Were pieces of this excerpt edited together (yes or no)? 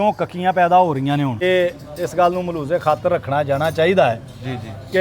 yes